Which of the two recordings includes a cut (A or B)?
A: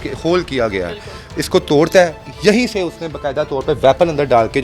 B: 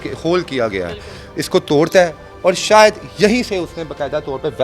A